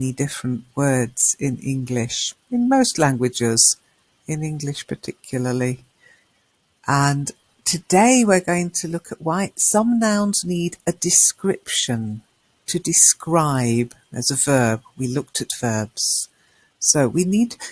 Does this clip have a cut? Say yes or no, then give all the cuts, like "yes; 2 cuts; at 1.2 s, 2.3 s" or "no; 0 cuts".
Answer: yes; 1 cut; at 3.4 s